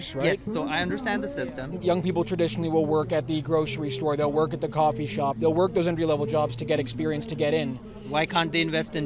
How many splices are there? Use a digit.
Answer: 1